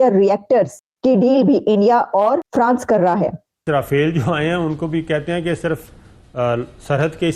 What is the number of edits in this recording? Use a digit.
1